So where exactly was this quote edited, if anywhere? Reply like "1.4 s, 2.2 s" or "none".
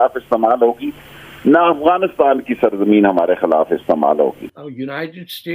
4.5 s